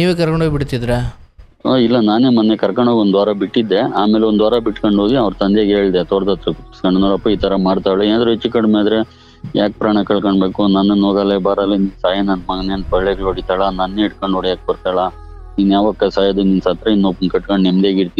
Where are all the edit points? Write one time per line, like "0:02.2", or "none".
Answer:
none